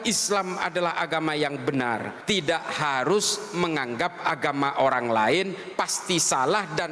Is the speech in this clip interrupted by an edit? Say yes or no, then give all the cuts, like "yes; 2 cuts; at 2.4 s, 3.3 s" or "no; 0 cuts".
yes; 1 cut; at 2.1 s